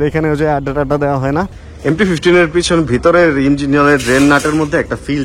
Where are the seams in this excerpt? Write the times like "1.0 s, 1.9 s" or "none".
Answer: 1.5 s